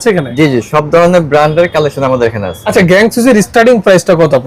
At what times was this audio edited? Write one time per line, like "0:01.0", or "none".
0:02.6